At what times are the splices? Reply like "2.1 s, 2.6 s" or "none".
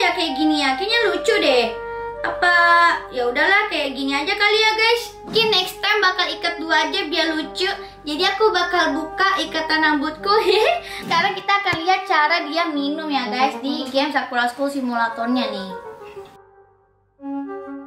5.3 s, 11.0 s